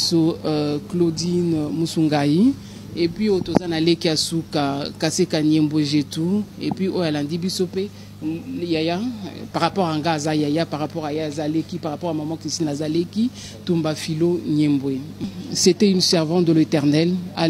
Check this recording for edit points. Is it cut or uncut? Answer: cut